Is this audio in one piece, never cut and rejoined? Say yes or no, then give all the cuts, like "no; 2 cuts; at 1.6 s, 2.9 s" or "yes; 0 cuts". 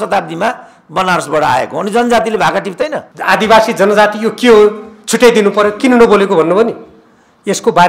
no; 1 cut; at 3.1 s